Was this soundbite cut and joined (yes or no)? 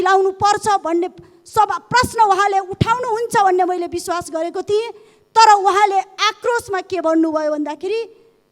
no